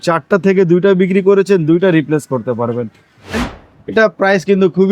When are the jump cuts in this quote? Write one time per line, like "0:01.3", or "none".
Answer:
0:03.4